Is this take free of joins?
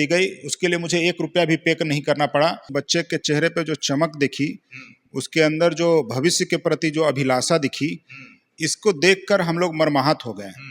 no; 1 cut; at 2.6 s

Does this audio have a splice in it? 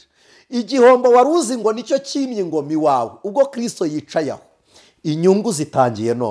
no; 0 cuts

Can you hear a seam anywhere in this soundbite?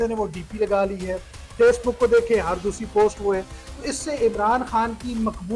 no; 0 cuts

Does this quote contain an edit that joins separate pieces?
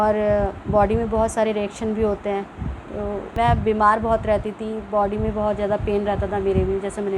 yes; 1 cut; at 3.4 s

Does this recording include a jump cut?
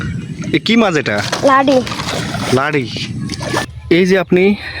yes; 1 cut; at 3.7 s

